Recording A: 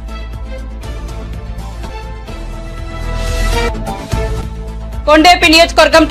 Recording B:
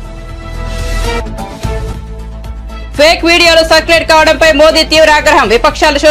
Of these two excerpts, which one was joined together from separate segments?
A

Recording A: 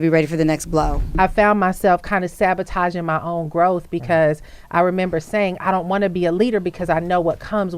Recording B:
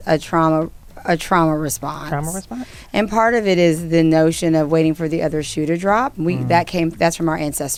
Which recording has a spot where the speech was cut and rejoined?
A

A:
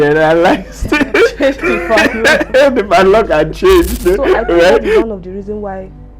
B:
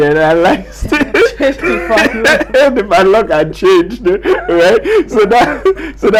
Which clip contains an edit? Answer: A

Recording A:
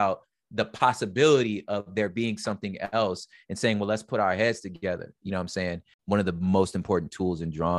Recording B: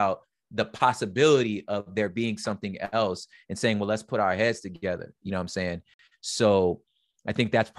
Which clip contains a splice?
A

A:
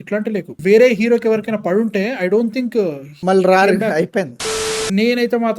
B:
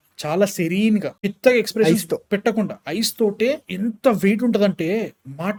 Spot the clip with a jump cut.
A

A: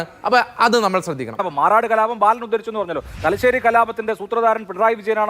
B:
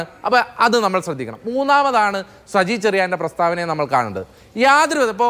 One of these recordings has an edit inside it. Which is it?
A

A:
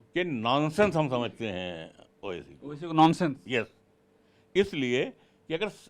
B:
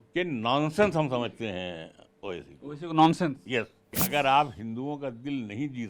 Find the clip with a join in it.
B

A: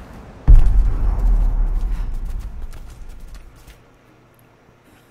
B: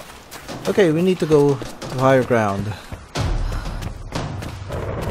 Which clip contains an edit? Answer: A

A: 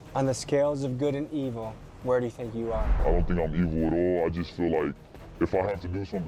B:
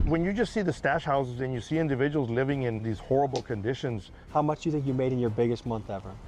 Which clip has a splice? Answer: B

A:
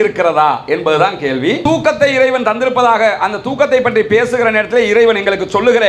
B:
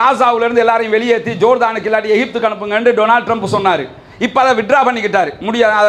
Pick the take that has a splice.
A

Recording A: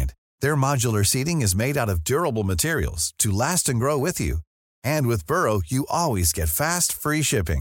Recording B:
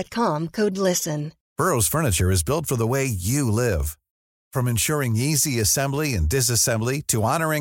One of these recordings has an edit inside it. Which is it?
B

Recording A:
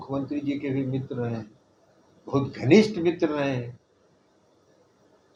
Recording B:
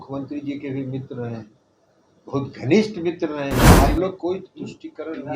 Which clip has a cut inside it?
B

